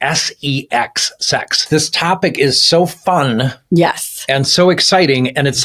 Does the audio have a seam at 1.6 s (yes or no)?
yes